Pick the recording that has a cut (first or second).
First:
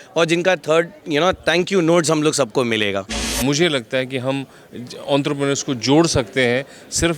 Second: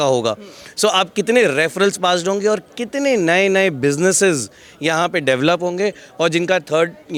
first